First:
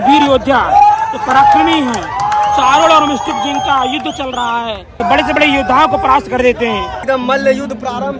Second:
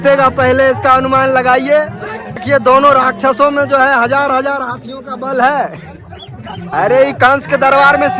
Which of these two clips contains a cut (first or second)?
first